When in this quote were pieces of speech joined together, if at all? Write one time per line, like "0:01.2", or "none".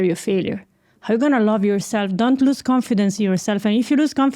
none